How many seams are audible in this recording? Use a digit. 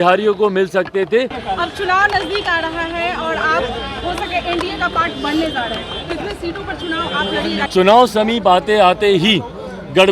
2